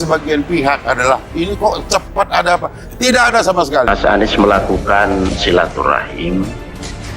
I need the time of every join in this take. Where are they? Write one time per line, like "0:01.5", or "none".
0:03.9